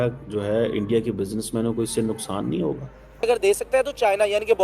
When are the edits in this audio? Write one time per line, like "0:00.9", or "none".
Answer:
0:03.2